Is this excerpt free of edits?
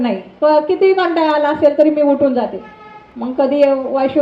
yes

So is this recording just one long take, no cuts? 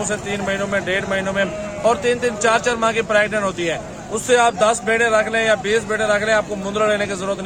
yes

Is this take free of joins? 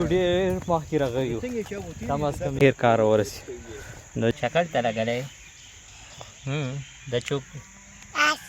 no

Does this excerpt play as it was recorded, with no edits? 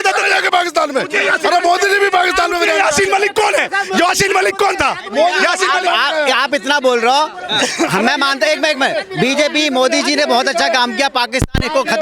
yes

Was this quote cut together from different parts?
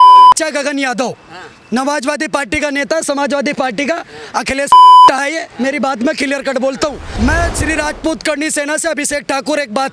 yes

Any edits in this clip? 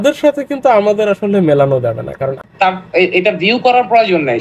yes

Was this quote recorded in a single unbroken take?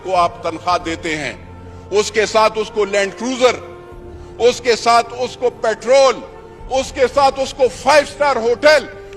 yes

